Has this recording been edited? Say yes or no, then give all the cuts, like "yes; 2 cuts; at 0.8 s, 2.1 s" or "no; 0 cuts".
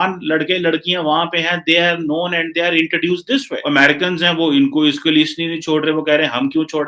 yes; 1 cut; at 3.5 s